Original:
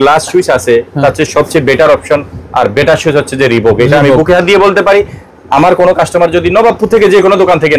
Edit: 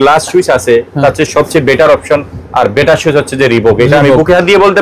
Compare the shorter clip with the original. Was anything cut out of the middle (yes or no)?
no